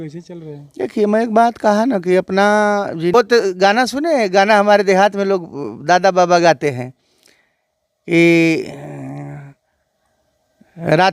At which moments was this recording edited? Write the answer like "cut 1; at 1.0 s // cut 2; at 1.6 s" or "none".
cut 1; at 3.1 s